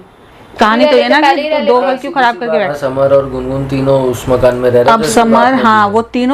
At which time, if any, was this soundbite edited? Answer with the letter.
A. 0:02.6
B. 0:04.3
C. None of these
A